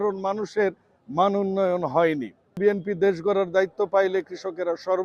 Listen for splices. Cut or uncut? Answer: cut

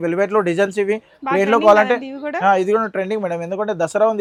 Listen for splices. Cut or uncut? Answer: uncut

